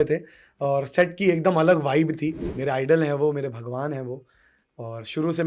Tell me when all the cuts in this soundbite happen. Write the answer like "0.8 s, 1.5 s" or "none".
2.5 s